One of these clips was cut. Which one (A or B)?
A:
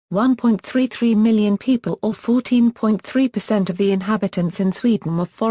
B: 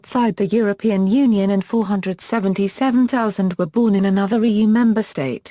A